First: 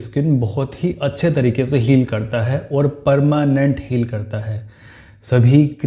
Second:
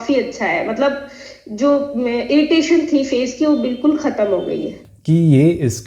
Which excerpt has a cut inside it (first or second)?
second